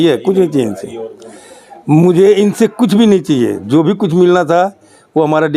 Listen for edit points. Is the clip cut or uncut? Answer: uncut